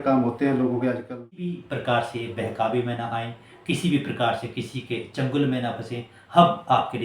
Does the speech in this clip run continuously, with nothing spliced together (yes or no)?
no